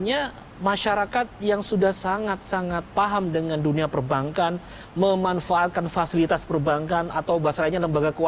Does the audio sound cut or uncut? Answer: uncut